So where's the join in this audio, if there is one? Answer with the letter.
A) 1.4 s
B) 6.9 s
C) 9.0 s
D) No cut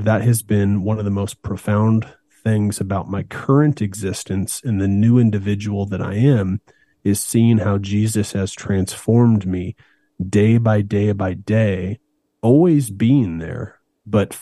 D